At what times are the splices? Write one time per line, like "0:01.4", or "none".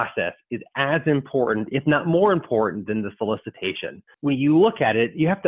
0:04.1